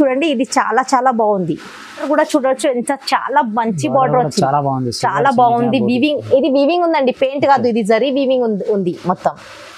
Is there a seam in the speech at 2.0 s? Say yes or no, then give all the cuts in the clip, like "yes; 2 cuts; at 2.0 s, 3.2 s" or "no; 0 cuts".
yes; 1 cut; at 2.0 s